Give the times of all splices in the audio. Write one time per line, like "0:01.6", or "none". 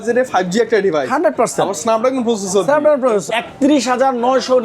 0:03.2